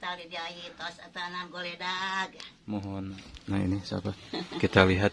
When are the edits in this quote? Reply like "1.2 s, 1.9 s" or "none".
3.3 s